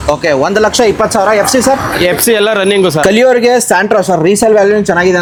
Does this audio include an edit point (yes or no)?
no